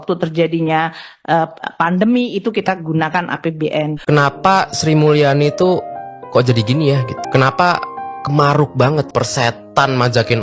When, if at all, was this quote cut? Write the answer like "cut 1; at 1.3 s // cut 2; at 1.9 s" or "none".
cut 1; at 4.0 s // cut 2; at 7.2 s // cut 3; at 9.1 s